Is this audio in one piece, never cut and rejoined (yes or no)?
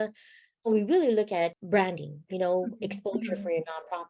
no